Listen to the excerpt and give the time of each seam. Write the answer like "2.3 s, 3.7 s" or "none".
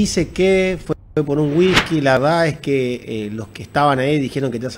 none